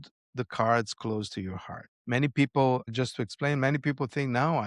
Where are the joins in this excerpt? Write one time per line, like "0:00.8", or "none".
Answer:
0:01.9
0:02.9